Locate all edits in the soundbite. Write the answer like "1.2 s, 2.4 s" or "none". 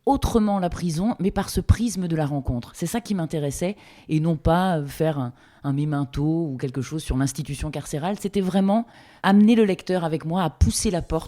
9.1 s